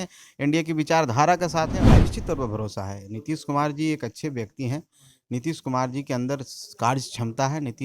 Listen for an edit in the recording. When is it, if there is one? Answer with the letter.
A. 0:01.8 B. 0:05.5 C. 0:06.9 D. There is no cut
A